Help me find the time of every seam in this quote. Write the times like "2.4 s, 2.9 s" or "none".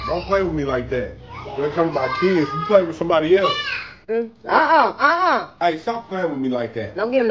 4.1 s